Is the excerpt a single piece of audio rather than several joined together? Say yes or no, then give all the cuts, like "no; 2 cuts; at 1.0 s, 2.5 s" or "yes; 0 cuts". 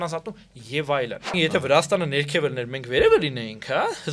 no; 1 cut; at 1.3 s